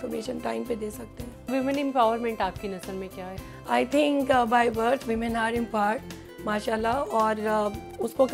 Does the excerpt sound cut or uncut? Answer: uncut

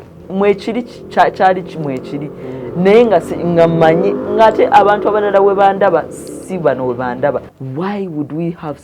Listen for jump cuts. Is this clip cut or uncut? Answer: cut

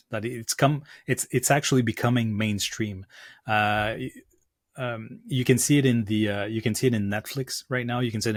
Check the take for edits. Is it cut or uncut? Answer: uncut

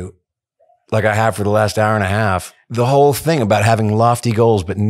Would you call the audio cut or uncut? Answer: cut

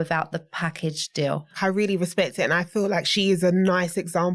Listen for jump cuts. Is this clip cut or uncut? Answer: cut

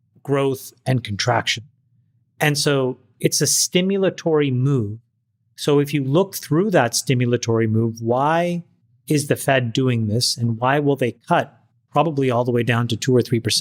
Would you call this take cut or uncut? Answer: uncut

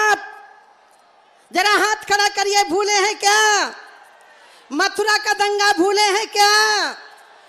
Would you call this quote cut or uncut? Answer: uncut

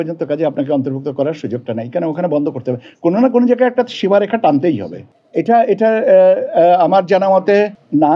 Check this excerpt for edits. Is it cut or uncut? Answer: uncut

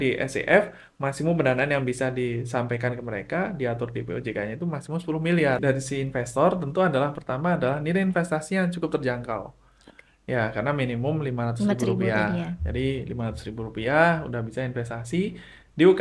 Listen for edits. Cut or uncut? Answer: cut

